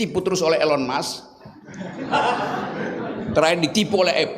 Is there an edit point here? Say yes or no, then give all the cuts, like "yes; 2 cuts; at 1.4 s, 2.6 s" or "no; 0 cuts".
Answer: no; 0 cuts